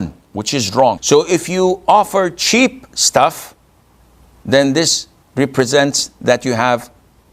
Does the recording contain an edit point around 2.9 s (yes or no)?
no